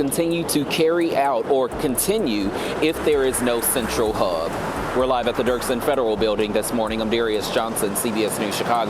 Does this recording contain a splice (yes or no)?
no